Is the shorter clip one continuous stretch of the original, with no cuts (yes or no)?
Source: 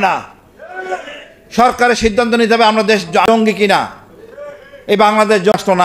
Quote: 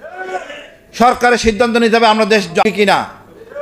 no